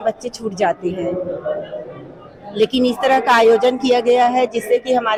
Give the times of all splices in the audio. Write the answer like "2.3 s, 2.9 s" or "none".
none